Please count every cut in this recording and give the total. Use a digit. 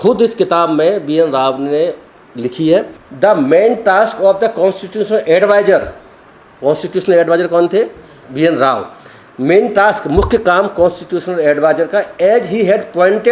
1